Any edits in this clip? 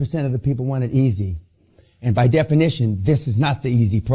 no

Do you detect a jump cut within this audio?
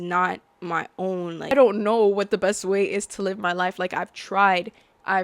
yes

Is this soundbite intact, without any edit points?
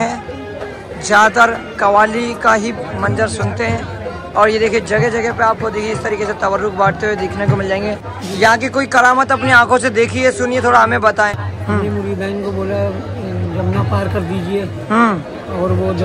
no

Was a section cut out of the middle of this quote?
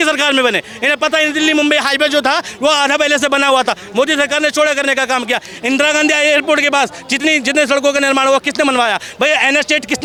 no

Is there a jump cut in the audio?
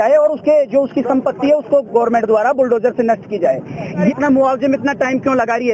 yes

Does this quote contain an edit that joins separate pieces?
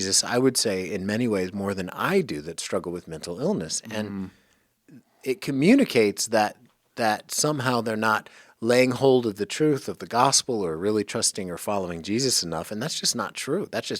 yes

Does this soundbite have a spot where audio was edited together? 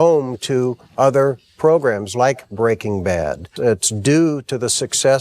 yes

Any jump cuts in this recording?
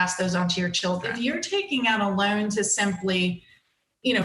yes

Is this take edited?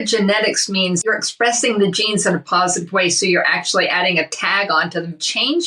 yes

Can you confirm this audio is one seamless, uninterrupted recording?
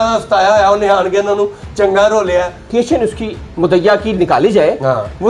no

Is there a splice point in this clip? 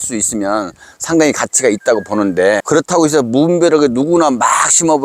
no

